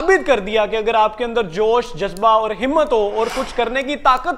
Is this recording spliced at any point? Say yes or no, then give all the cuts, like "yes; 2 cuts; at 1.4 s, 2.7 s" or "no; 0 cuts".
no; 0 cuts